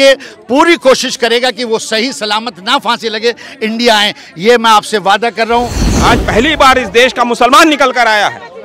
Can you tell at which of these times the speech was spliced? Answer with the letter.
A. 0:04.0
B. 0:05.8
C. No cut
B